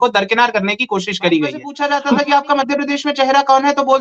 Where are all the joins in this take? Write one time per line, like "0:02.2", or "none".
0:01.7